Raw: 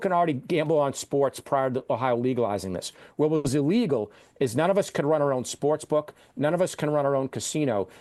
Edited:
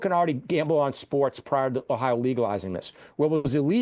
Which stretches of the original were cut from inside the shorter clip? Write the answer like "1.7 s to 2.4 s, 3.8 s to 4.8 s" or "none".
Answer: none